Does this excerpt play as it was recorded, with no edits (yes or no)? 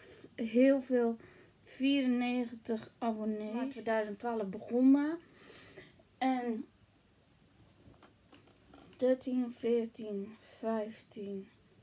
no